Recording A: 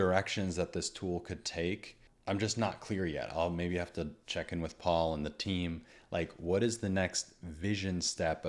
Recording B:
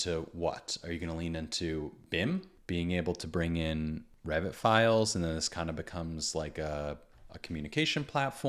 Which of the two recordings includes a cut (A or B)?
B